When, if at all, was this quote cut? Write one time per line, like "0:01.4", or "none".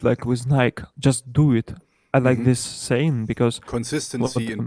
0:03.6